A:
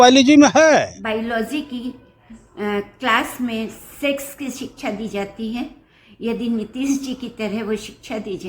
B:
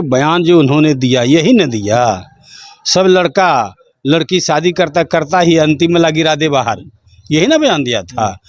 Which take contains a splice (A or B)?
A